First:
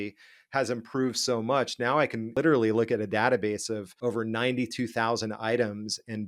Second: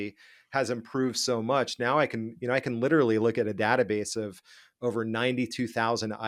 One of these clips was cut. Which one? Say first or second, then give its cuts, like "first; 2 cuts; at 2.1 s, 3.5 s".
first; 2 cuts; at 2.3 s, 3.9 s